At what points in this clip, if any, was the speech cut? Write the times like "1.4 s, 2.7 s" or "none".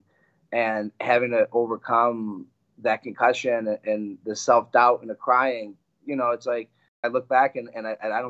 7.0 s